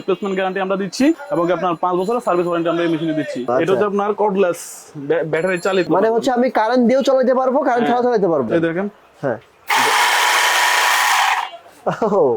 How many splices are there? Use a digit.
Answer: 4